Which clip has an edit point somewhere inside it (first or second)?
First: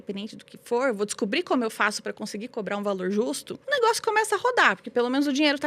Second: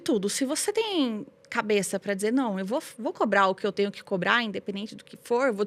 first